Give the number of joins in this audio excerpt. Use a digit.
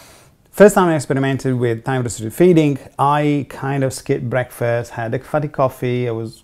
0